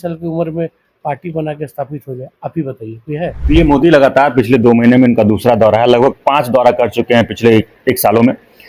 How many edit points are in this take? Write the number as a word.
one